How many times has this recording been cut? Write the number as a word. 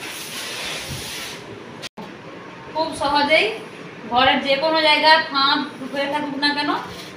one